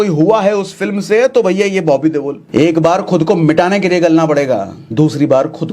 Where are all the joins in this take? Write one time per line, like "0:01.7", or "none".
0:02.4
0:04.8